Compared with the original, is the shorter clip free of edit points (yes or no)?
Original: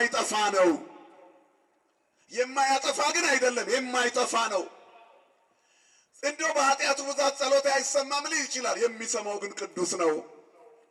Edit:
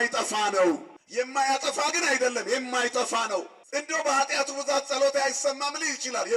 no